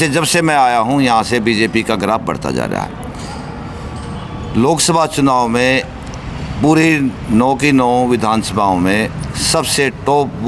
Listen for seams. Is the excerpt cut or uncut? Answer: uncut